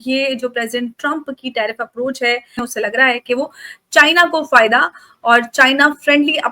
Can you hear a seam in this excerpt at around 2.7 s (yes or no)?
yes